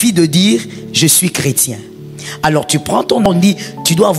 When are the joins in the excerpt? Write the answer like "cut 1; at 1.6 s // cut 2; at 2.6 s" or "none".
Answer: cut 1; at 3.2 s